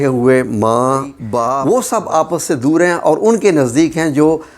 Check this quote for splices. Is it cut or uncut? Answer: cut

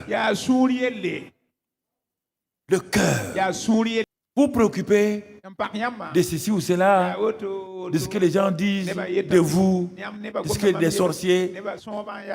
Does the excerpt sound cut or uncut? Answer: cut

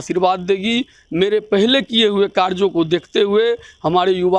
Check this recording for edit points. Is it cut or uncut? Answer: uncut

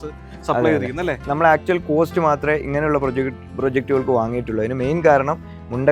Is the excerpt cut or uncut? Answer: uncut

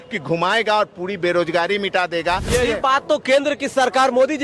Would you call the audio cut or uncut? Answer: cut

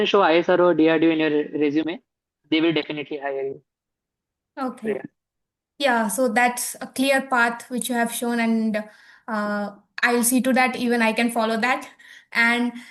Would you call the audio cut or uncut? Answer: uncut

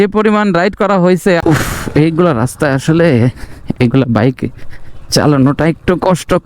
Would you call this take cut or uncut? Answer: cut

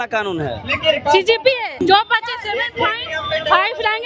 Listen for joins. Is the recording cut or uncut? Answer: cut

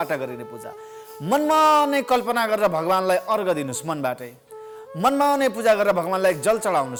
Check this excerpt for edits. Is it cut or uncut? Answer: uncut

